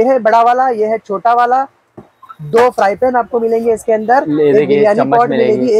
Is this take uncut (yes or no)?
yes